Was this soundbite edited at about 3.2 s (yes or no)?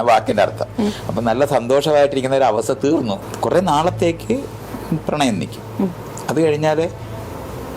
yes